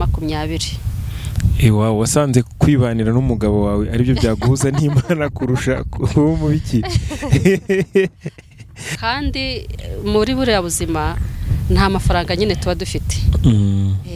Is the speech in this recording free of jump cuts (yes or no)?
no